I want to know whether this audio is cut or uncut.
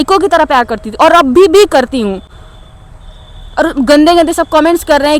uncut